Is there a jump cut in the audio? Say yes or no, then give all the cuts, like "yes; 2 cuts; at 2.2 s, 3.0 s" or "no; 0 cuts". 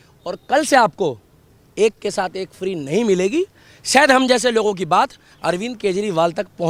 no; 0 cuts